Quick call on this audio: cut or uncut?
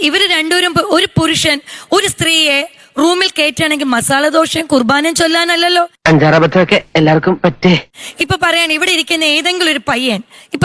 uncut